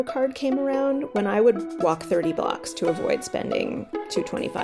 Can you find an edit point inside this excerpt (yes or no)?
no